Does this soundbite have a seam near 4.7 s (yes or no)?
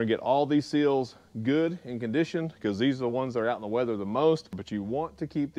yes